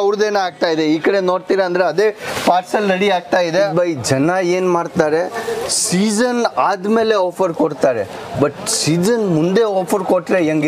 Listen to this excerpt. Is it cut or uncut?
cut